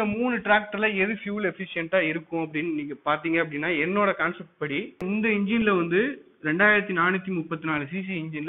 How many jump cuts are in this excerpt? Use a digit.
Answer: 1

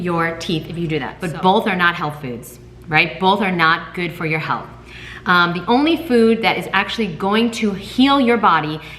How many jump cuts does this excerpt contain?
1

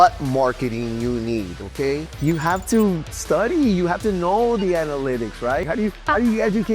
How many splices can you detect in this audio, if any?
2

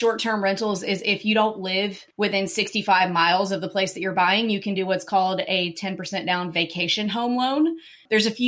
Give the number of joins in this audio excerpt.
1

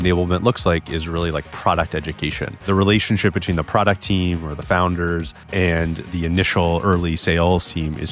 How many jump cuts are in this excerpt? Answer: 2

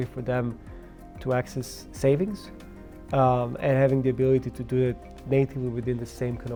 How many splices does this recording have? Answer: 0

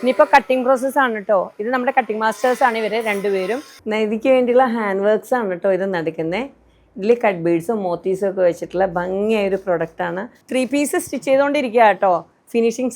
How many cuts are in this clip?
2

